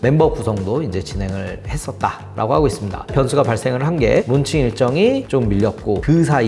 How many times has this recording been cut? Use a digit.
2